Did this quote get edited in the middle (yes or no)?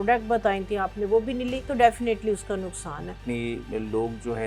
yes